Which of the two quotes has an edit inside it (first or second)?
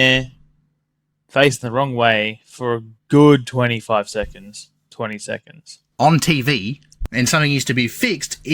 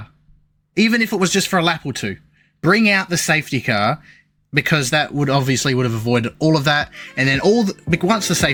first